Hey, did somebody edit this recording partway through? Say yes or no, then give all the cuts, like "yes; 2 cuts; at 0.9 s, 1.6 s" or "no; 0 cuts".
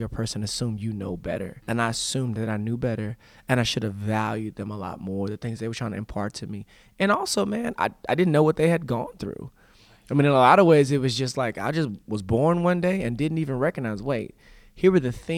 no; 0 cuts